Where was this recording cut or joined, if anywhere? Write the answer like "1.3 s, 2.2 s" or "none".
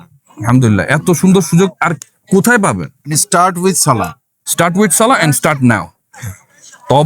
3.2 s

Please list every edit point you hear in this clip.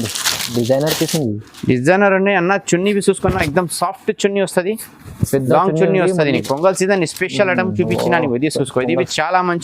6.4 s

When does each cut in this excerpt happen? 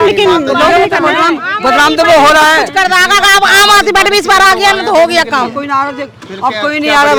none

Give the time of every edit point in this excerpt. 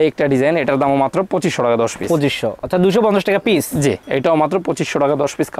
none

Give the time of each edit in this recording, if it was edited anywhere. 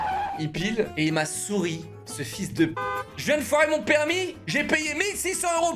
0.9 s, 3.1 s

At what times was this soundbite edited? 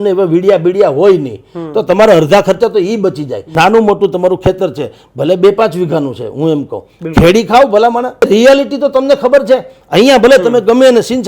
3.4 s, 8.2 s

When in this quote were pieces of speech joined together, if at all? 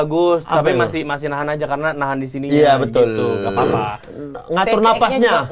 none

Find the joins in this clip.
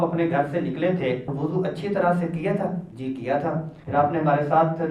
1.3 s, 2.9 s, 3.7 s

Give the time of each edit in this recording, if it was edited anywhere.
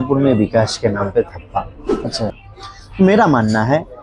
2.3 s

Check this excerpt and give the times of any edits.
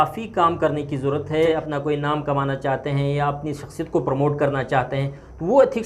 1.5 s

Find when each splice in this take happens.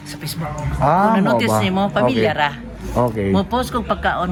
none

